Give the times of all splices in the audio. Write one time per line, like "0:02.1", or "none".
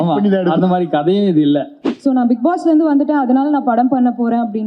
0:01.8